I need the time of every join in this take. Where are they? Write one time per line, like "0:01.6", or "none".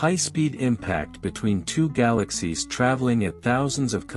0:01.1
0:01.9